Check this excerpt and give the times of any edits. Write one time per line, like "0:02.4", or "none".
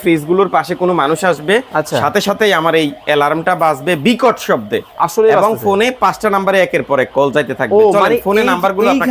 none

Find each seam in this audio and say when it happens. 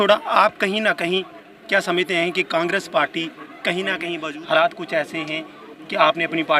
0:04.2

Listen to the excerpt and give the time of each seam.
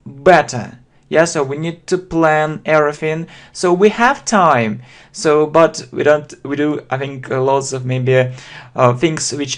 0:01.8

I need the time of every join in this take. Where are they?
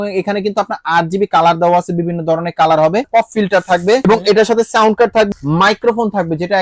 0:03.1
0:04.0
0:05.3

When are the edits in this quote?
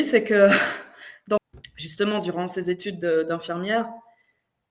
0:01.4

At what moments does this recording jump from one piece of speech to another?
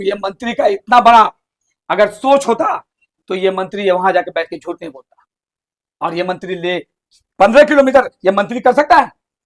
none

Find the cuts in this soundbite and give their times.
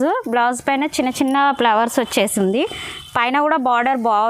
none

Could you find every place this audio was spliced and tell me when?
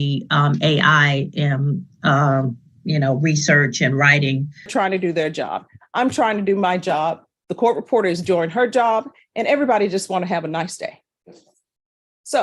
0:04.7

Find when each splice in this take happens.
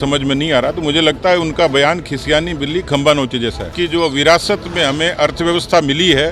0:03.7

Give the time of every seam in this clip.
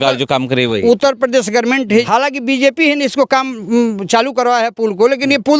0:02.1

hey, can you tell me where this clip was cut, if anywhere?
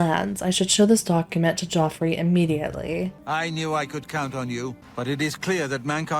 0:03.2
0:04.8

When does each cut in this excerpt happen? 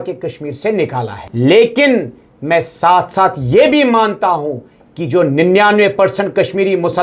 0:01.2

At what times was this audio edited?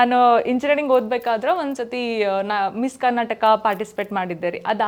none

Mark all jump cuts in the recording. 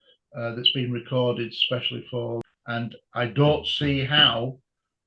0:02.5

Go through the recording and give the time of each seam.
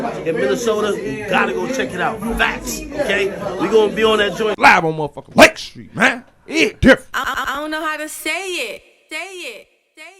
none

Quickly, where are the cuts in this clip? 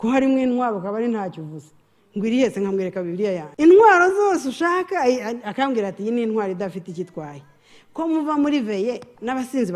0:03.5

